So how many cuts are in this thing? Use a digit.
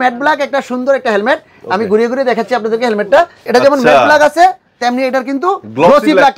1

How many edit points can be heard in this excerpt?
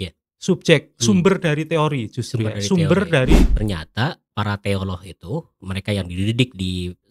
1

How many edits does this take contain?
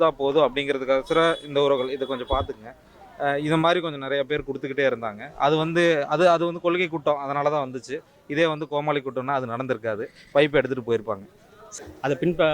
1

